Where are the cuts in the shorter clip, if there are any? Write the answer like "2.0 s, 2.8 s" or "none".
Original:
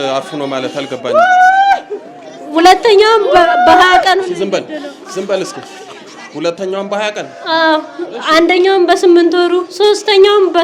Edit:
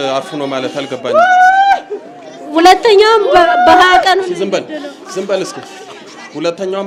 none